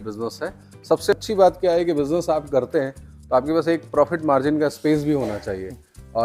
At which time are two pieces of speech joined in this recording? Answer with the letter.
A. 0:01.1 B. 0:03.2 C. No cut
A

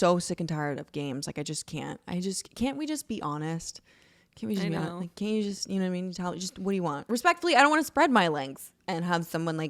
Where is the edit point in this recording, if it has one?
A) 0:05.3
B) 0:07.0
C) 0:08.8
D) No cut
B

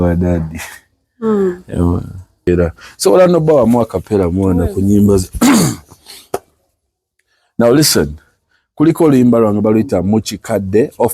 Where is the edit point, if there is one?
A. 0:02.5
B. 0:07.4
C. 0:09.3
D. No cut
A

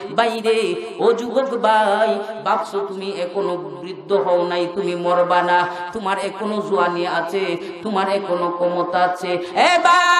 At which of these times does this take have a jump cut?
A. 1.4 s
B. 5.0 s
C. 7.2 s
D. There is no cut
D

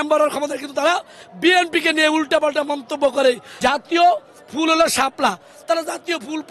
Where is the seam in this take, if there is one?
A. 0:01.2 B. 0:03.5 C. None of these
B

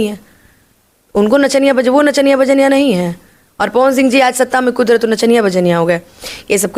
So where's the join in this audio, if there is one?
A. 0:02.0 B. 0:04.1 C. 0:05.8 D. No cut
D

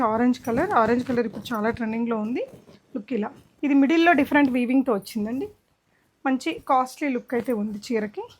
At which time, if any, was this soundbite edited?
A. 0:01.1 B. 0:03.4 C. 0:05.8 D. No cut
B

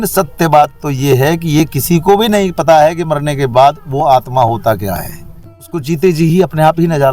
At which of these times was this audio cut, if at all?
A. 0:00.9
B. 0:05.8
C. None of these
B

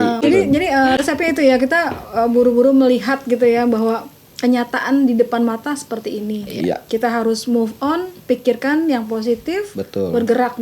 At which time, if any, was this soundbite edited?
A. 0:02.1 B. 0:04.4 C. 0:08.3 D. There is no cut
D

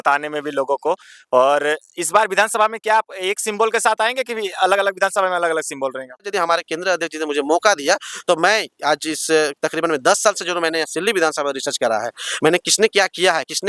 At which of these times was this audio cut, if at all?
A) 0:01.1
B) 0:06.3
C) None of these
B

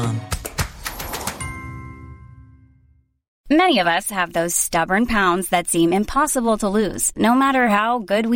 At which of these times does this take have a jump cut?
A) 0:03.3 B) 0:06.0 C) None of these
A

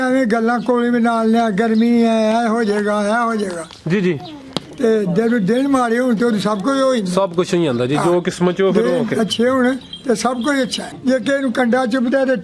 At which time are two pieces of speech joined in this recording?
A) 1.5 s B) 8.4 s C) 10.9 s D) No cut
C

